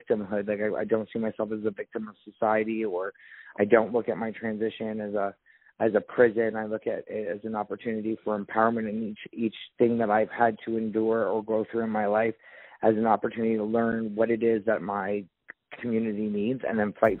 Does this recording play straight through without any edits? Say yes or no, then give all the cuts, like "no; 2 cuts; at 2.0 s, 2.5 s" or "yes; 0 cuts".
yes; 0 cuts